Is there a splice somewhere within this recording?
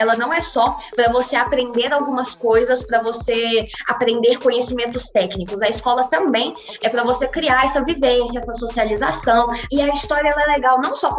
yes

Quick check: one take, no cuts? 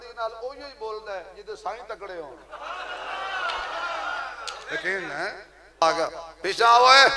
no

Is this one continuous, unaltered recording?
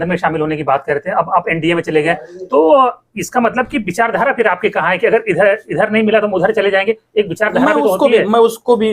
yes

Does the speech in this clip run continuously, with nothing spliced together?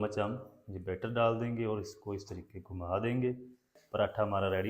no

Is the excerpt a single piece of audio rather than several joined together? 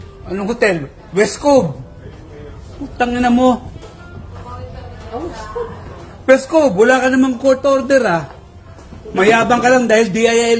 yes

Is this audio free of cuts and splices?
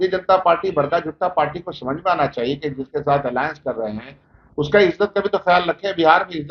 yes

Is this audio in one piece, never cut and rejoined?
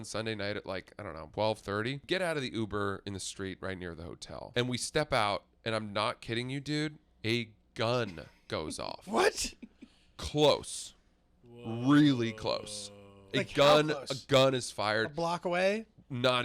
no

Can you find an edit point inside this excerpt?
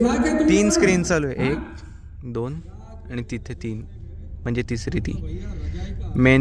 no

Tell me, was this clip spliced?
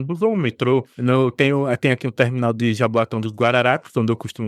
yes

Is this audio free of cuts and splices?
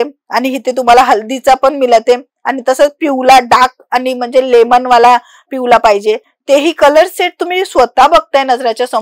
yes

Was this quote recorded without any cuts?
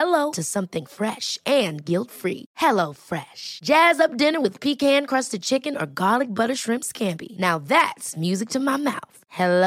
yes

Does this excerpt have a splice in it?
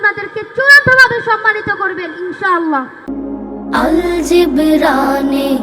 yes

